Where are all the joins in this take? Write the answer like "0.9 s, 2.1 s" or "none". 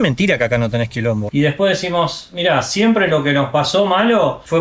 1.3 s